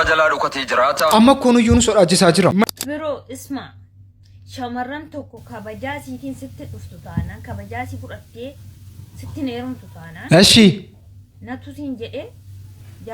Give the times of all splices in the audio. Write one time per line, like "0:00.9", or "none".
0:01.1
0:02.7